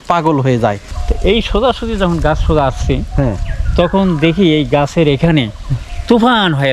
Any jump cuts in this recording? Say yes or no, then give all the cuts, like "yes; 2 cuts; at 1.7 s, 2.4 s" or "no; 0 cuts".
yes; 1 cut; at 0.9 s